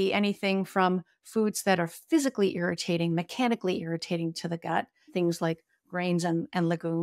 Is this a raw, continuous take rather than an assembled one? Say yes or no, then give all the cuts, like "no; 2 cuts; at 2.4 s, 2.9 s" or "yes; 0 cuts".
no; 1 cut; at 5.1 s